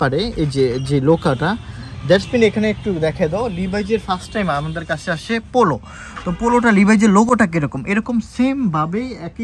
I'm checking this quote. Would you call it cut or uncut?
uncut